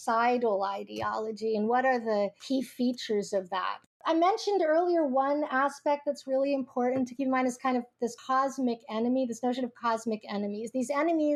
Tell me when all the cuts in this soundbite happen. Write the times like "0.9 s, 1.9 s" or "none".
none